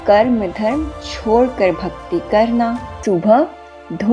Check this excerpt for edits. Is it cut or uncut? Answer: cut